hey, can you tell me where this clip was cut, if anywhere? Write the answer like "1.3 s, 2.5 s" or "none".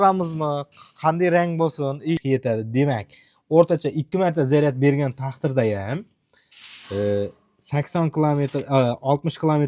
2.2 s